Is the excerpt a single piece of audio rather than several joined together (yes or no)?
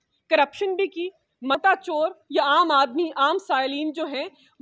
no